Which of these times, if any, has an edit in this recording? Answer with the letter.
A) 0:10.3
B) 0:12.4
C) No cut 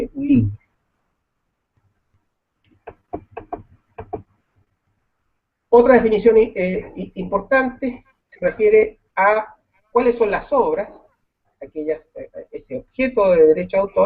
A